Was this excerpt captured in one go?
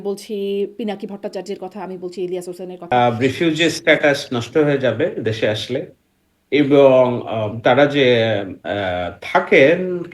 no; 1 cut; at 2.9 s

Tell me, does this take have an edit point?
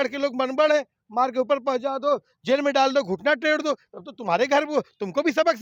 no; 0 cuts

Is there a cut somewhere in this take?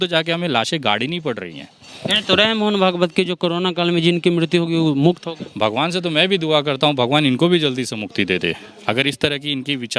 no; 0 cuts

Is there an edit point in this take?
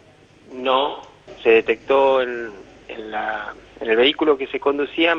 no; 0 cuts

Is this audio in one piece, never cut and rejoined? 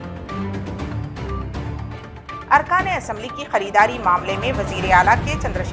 no; 1 cut; at 2.3 s

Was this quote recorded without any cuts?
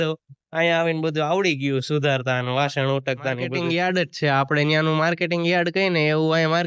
no; 1 cut; at 3.5 s

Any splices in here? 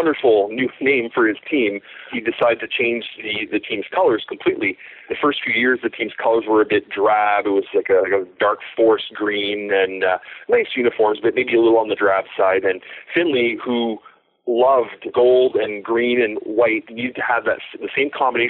yes; 4 cuts; at 2.0 s, 5.1 s, 15.0 s, 16.9 s

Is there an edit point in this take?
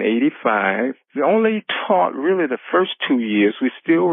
yes; 1 cut; at 1.0 s

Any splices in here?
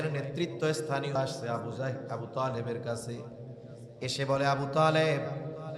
yes; 1 cut; at 1.2 s

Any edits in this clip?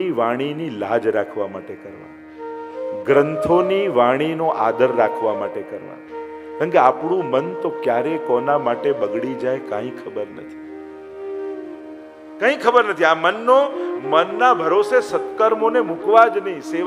no; 0 cuts

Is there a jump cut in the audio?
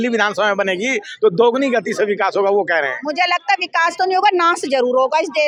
no; 0 cuts

